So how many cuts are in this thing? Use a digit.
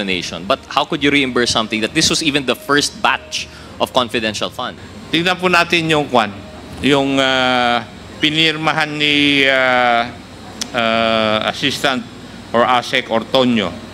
1